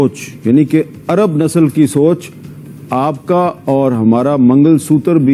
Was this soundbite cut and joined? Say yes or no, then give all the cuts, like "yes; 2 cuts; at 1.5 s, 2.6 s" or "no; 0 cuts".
no; 0 cuts